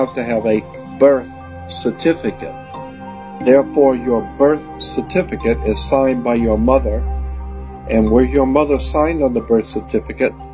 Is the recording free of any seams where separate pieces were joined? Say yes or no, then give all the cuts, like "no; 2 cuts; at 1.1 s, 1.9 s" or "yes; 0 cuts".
no; 1 cut; at 3.0 s